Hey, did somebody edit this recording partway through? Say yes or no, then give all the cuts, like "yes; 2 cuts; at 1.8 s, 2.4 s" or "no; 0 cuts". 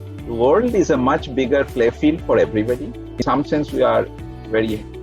yes; 1 cut; at 3.2 s